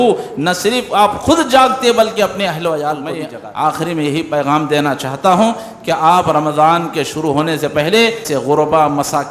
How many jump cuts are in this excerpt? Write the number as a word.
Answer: two